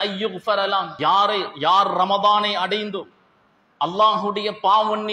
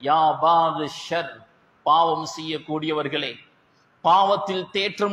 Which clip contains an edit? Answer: first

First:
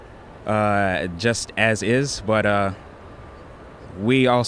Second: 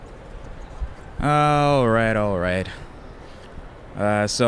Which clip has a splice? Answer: second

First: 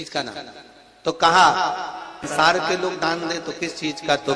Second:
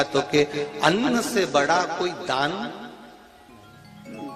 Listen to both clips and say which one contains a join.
first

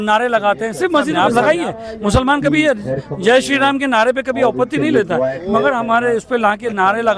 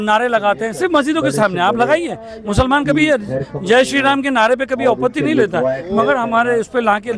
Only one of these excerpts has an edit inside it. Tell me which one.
first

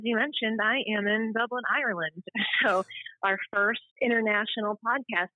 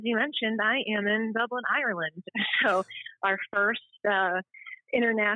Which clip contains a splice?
first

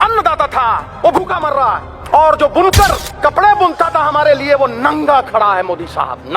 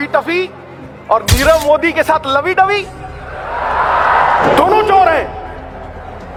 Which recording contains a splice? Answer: first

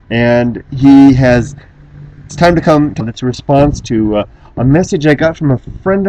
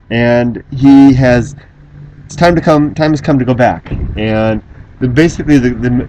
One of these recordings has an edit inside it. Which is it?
second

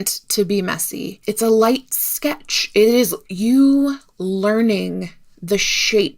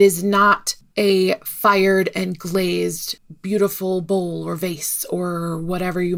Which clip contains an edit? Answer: first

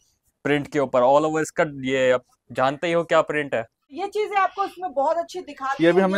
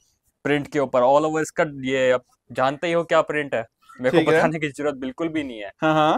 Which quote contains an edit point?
first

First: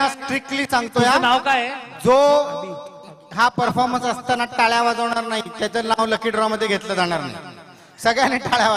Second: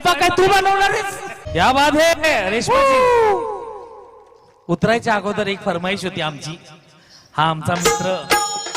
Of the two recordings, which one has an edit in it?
second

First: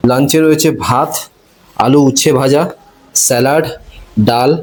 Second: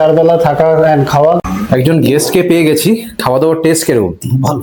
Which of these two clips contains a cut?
second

